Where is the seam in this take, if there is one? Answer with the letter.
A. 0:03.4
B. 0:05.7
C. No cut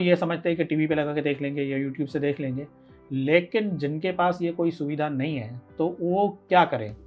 C